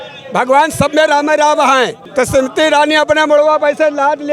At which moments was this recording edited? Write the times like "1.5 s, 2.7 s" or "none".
2.0 s